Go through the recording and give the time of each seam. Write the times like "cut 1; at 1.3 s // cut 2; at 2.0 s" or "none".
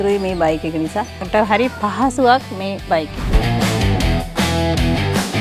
cut 1; at 1.3 s // cut 2; at 3.3 s